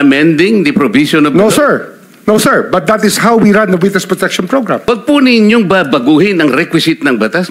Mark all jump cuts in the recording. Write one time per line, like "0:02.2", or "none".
0:04.9